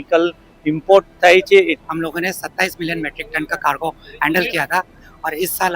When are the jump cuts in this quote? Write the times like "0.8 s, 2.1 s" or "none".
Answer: 1.8 s